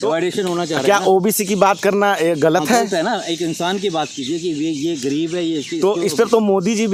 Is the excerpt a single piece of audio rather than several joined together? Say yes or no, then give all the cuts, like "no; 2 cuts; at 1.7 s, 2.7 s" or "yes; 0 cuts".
yes; 0 cuts